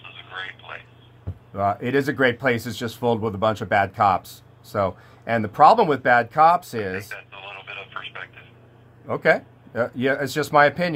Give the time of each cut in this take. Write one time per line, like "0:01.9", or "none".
none

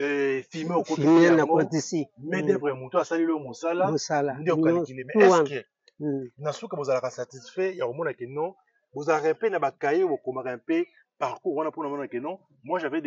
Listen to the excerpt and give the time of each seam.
none

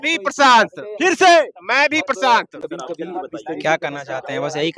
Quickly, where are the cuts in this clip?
0:02.6

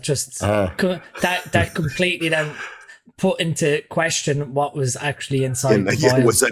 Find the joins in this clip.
none

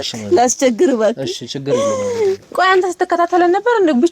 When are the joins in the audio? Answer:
0:02.4

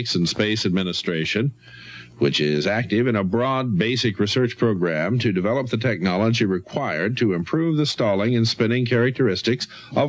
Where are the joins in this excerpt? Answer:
none

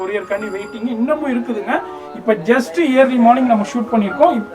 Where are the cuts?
none

